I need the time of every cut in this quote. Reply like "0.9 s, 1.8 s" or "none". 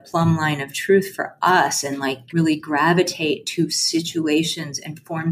2.2 s